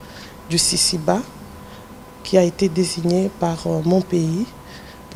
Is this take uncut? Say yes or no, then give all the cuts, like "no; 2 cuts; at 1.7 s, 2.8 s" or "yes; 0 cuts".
yes; 0 cuts